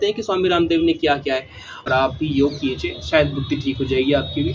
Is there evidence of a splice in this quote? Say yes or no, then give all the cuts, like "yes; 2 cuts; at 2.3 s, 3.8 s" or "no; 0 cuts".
yes; 1 cut; at 1.8 s